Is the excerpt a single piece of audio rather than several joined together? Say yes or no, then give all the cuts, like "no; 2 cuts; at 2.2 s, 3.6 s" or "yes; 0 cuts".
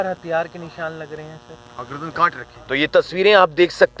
no; 1 cut; at 2.8 s